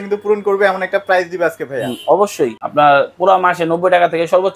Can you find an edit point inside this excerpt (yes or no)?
yes